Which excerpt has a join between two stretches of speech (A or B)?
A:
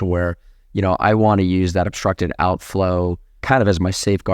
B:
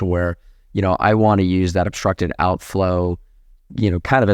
A